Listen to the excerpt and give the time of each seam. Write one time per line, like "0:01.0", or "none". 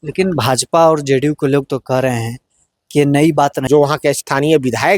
0:03.6